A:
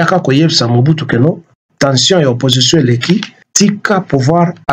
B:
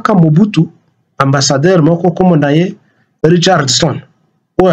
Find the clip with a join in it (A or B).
A